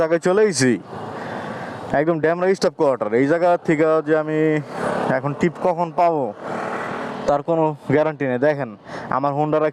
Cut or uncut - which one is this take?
uncut